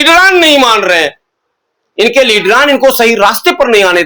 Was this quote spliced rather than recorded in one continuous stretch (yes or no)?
no